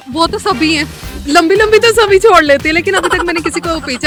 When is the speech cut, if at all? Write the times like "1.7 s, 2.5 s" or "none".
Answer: none